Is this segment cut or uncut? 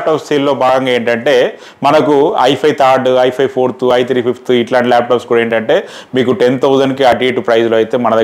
uncut